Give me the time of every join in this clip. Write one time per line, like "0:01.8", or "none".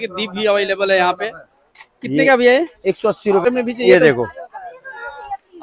0:03.5